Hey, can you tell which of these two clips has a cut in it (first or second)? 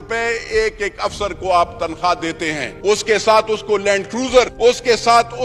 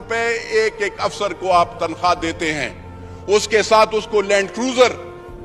first